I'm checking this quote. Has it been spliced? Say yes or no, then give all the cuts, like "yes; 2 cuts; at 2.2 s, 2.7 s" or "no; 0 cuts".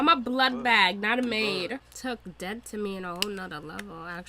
yes; 1 cut; at 1.9 s